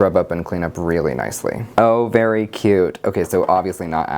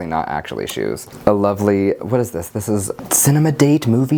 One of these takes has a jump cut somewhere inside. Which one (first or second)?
first